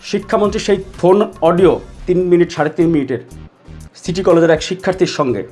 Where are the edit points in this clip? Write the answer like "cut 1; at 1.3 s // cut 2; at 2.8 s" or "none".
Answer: cut 1; at 0.9 s // cut 2; at 1.9 s